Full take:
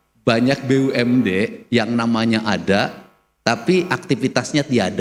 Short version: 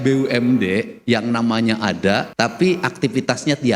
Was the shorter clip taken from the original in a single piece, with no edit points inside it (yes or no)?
no